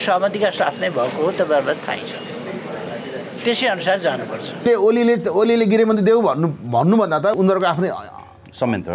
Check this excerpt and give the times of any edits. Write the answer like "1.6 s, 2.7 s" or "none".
4.6 s, 7.3 s